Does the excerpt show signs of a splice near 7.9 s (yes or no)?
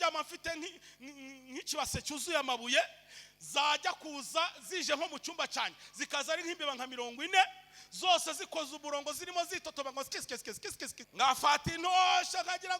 no